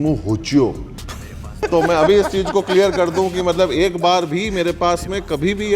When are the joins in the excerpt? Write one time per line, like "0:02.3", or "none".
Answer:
0:01.5